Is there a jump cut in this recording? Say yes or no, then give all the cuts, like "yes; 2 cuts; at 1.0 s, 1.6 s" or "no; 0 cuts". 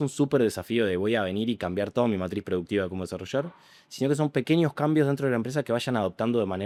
no; 0 cuts